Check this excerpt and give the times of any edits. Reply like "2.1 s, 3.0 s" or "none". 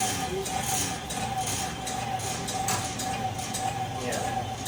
none